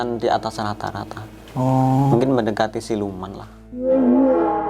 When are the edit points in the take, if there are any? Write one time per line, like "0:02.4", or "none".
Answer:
0:03.6